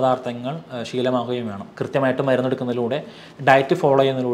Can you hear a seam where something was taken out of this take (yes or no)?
yes